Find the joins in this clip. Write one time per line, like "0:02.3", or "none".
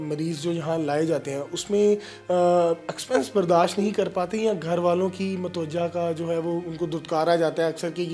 none